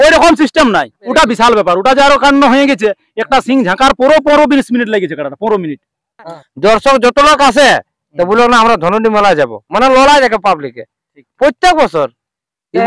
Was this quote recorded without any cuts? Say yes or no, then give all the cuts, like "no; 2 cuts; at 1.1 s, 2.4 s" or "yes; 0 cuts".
no; 2 cuts; at 1.0 s, 6.4 s